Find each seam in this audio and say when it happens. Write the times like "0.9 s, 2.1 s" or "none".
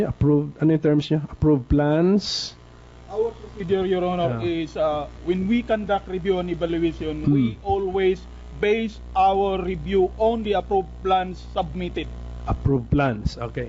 1.6 s